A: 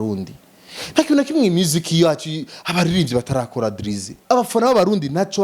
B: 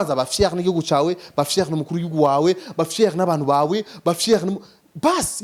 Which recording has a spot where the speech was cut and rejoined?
A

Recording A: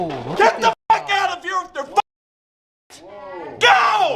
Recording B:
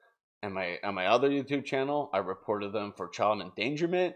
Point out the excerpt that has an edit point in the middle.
A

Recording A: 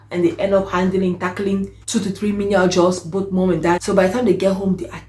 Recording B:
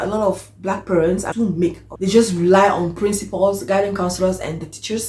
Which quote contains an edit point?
B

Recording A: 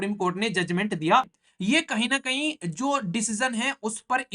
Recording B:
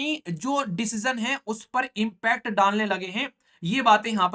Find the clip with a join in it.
A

